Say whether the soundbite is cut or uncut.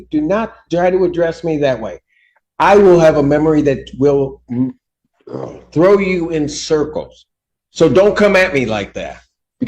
uncut